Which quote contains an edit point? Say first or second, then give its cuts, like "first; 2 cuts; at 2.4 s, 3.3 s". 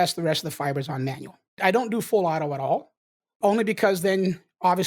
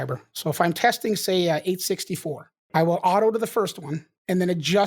second; 1 cut; at 2.6 s